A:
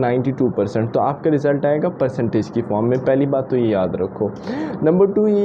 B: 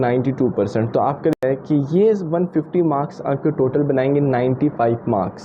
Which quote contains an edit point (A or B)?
B